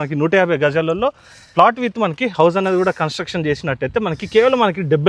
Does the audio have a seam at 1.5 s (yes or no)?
no